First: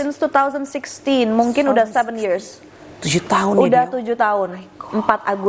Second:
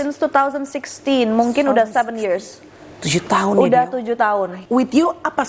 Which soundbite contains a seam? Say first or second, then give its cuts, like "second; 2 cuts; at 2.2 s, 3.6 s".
second; 1 cut; at 4.6 s